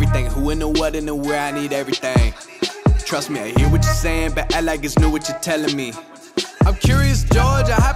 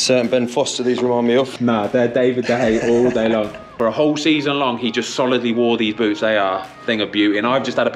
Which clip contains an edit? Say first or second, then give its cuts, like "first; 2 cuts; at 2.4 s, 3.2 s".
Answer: second; 2 cuts; at 1.5 s, 3.7 s